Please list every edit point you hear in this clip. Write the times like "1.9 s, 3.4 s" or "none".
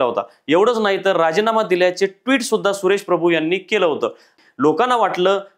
4.3 s

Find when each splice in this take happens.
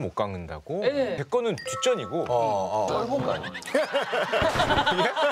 1.2 s, 2.9 s

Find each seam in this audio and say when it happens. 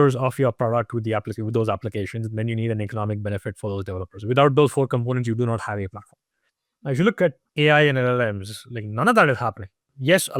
6.6 s, 7.4 s

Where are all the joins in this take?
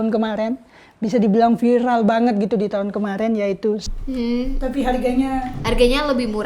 3.9 s

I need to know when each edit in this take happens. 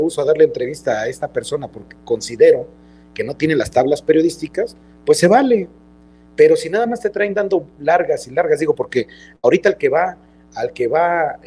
none

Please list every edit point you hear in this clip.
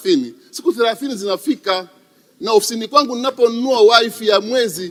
none

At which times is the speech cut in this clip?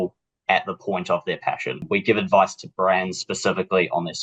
1.8 s

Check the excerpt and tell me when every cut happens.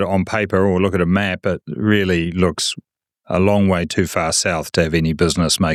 none

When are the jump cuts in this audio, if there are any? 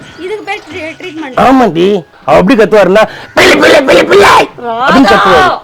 2.1 s

